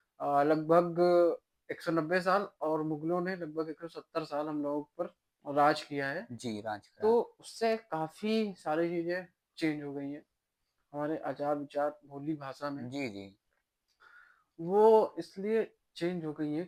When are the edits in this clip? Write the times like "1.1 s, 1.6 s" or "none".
none